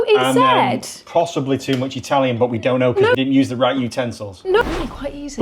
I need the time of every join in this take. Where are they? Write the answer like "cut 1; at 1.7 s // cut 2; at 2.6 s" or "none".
cut 1; at 3.1 s // cut 2; at 4.6 s